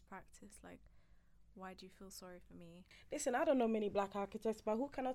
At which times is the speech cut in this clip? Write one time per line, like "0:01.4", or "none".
0:02.9